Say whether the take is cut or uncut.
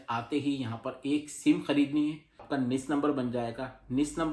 cut